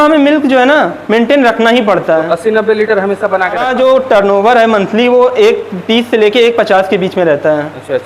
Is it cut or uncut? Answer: cut